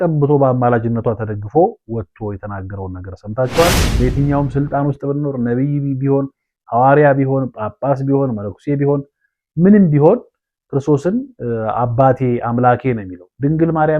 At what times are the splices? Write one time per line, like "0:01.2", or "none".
0:03.9